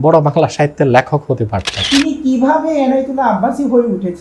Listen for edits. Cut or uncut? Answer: cut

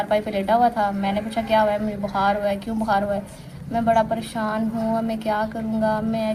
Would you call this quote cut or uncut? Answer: uncut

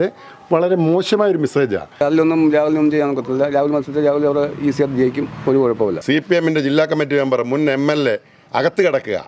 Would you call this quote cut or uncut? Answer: cut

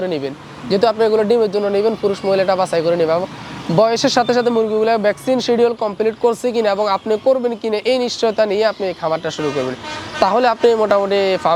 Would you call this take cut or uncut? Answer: uncut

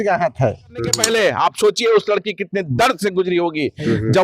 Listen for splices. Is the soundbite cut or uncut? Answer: cut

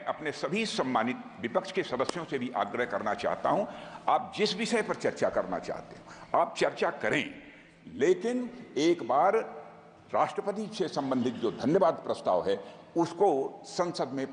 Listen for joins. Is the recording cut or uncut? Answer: uncut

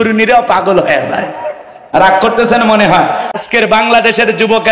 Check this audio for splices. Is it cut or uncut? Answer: cut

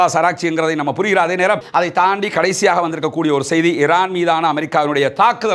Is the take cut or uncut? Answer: cut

